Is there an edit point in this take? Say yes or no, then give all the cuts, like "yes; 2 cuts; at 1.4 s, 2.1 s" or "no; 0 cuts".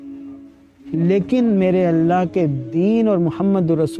no; 0 cuts